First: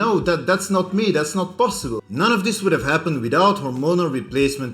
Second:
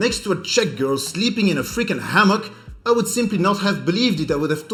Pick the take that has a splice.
first; 1 cut; at 2.0 s

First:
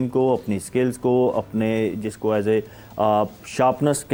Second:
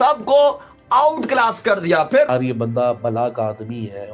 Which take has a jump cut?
second; 1 cut; at 2.3 s

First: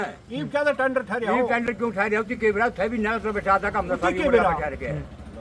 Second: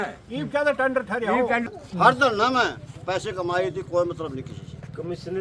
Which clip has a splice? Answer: second; 1 cut; at 1.7 s

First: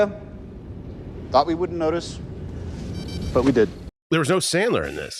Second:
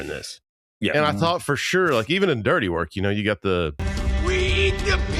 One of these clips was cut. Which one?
first; 1 cut; at 3.9 s

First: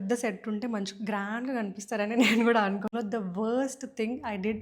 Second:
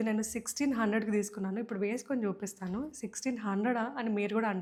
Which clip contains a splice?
first; 1 cut; at 2.9 s

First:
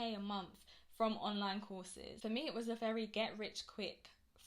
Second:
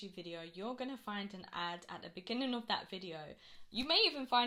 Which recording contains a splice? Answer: first; 1 cut; at 2.1 s

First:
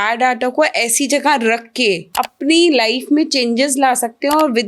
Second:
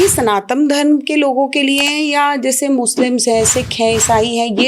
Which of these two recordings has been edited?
first; 1 cut; at 2.1 s

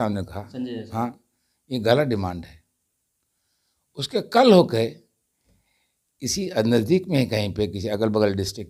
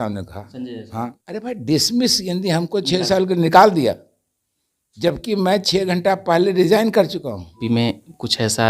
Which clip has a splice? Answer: second; 2 cuts; at 1.2 s, 7.6 s

